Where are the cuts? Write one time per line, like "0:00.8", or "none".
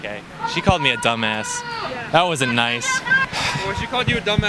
none